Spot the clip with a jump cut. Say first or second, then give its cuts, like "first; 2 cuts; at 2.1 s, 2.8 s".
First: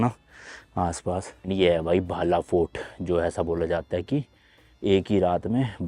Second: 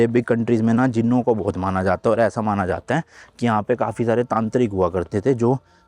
first; 1 cut; at 1.4 s